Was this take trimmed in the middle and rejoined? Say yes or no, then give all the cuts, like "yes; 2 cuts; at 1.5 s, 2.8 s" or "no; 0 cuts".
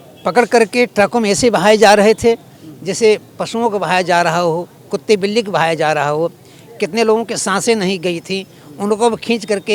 no; 0 cuts